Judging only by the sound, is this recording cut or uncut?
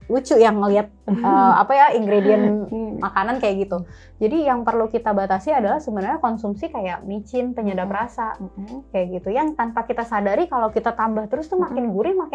uncut